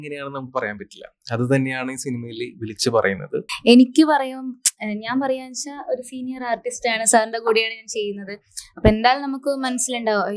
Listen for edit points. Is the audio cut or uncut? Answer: cut